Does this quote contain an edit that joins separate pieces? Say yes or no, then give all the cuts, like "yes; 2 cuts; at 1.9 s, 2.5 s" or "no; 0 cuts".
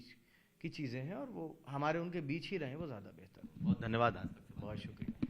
no; 0 cuts